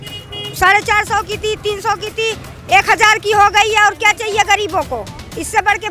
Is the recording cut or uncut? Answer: uncut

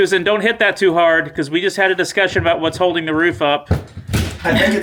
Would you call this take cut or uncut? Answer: uncut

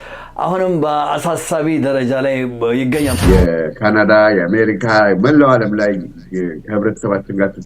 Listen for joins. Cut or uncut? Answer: cut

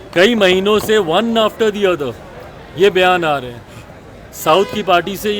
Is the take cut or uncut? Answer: uncut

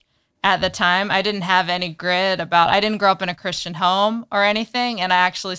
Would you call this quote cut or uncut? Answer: uncut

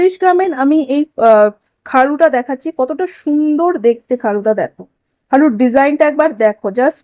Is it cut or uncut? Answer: uncut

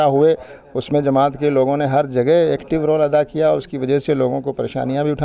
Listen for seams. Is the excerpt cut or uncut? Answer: uncut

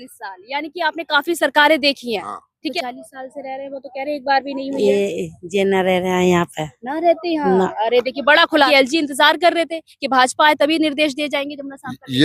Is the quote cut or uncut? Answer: cut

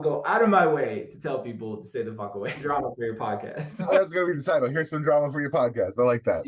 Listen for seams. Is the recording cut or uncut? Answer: cut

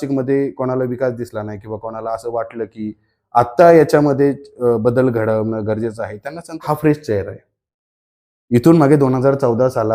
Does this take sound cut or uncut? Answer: cut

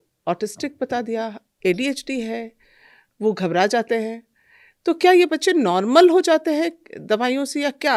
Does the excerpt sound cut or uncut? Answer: uncut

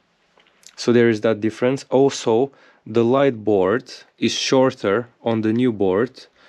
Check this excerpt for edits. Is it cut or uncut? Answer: uncut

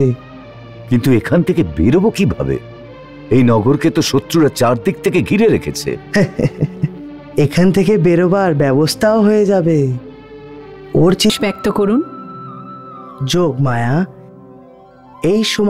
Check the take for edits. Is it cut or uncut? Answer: cut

